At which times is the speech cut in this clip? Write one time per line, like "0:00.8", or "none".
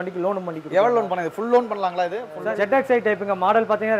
0:02.4